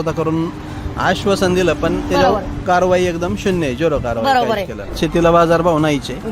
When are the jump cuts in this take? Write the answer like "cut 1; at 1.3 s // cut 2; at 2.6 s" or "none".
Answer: cut 1; at 4.9 s